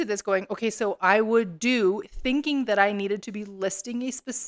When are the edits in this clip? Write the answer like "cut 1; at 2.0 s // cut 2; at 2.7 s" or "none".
none